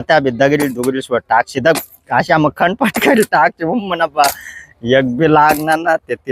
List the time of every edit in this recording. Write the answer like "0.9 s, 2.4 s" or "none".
none